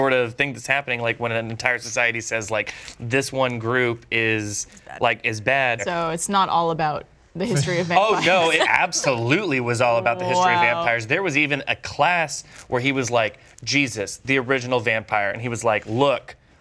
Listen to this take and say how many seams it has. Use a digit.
2